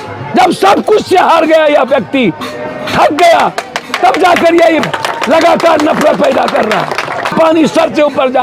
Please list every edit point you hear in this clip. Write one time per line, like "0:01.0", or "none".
0:07.3